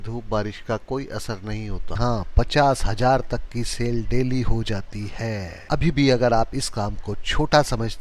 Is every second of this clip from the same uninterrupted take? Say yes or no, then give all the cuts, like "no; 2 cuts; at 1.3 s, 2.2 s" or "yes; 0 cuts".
no; 1 cut; at 2.0 s